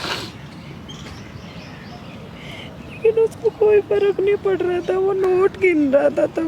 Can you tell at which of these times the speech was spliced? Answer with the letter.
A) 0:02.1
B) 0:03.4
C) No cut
C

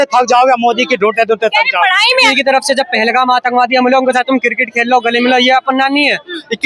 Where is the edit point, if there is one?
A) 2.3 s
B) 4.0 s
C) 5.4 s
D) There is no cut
A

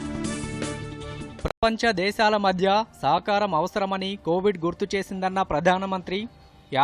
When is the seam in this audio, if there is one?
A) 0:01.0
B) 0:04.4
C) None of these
C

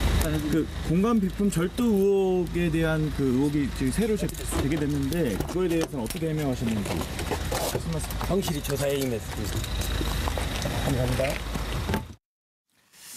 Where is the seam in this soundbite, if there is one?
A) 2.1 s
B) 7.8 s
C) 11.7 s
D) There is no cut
A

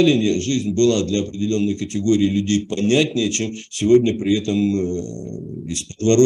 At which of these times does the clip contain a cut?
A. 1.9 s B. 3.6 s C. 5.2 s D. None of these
D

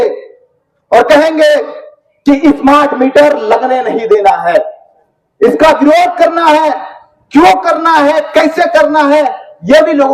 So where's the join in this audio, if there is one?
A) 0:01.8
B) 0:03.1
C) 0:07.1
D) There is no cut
D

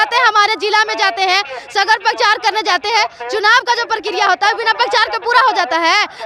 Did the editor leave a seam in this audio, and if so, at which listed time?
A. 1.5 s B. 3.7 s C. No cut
C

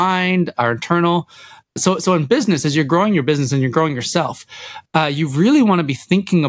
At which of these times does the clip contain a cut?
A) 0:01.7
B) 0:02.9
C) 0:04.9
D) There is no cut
A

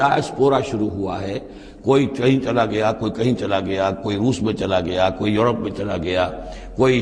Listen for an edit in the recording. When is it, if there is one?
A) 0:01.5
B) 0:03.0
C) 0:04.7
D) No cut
D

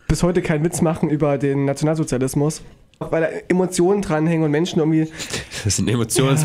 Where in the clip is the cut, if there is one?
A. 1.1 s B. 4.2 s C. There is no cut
A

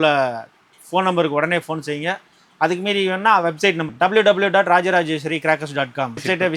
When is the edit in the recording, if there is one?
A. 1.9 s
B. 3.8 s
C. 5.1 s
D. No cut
B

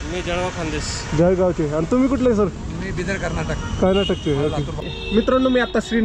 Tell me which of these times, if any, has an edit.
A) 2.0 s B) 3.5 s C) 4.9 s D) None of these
C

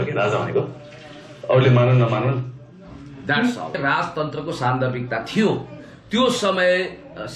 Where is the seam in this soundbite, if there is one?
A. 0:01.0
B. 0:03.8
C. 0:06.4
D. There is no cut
B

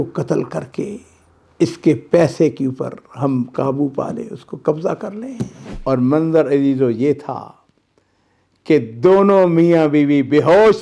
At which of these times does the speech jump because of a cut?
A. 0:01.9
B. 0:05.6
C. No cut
B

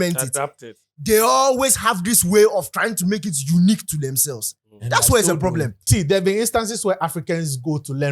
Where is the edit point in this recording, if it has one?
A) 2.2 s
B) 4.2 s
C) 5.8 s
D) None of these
C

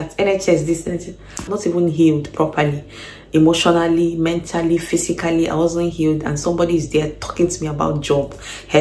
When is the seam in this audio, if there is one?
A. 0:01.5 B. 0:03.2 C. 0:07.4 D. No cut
A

